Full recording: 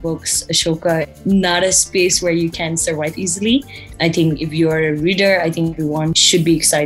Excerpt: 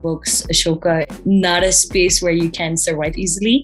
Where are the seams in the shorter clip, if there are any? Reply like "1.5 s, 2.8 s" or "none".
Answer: none